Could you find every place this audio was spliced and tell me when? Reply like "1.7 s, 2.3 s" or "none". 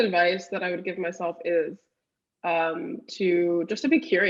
none